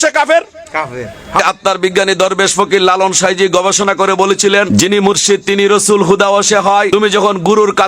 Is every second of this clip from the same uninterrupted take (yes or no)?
no